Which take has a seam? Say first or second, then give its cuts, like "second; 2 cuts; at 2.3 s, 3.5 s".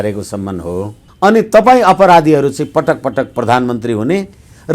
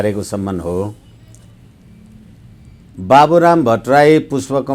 first; 1 cut; at 1.0 s